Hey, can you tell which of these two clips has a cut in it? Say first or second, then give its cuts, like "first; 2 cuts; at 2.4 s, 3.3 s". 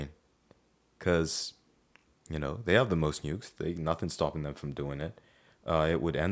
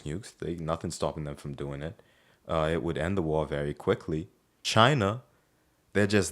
second; 1 cut; at 4.6 s